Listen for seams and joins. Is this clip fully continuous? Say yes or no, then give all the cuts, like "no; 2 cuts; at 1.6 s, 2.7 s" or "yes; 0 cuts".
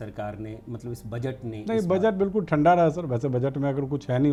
yes; 0 cuts